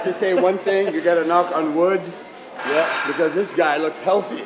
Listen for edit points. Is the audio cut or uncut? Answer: uncut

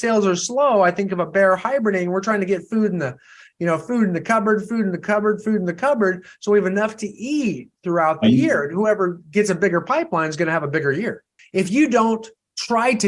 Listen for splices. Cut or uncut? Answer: uncut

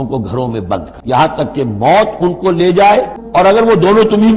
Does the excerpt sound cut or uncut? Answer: cut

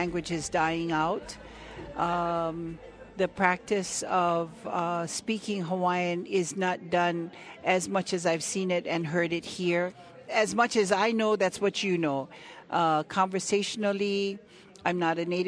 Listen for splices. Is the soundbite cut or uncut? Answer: cut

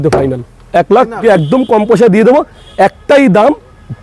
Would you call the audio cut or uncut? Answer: cut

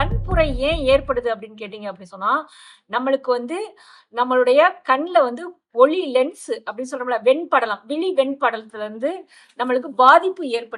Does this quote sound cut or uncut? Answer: uncut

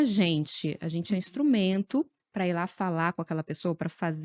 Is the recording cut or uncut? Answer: uncut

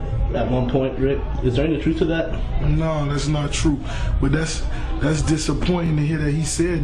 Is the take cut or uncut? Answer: uncut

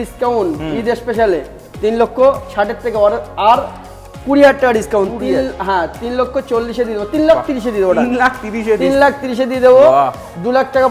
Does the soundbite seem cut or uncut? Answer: uncut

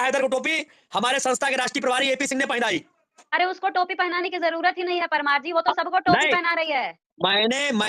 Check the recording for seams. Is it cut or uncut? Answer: uncut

